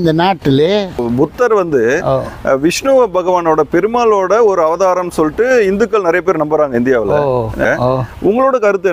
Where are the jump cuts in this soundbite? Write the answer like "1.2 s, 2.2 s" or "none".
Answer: 1.0 s, 7.6 s